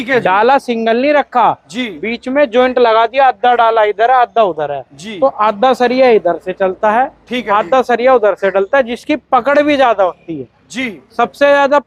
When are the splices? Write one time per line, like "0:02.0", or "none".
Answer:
none